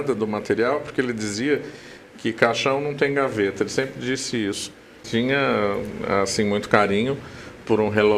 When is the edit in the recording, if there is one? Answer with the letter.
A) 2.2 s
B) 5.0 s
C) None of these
B